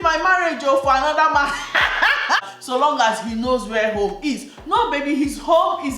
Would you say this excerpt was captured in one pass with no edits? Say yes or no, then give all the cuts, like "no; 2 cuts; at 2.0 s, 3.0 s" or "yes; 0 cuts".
no; 1 cut; at 2.5 s